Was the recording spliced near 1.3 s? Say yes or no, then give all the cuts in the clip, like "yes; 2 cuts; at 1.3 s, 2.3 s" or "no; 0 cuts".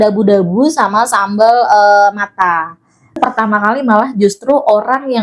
no; 1 cut; at 3.2 s